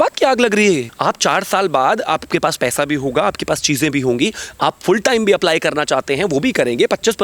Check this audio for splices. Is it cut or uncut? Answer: cut